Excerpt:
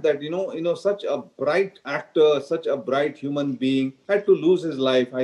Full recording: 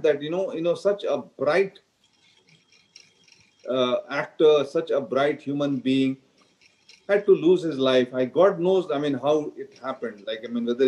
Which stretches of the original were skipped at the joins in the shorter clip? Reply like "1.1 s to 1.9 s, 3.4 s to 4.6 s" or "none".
1.9 s to 4.2 s, 6.2 s to 7.0 s